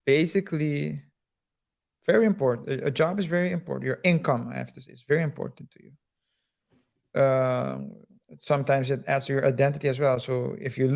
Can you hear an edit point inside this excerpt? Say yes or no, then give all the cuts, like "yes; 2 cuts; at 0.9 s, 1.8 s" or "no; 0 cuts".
no; 0 cuts